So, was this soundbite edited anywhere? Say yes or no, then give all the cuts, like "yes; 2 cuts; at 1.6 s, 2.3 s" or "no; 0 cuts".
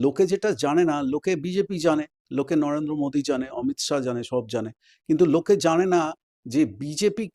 no; 0 cuts